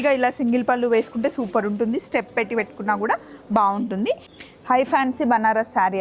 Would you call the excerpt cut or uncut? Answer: cut